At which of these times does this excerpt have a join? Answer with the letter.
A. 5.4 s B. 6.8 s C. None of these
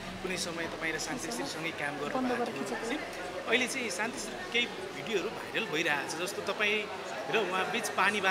C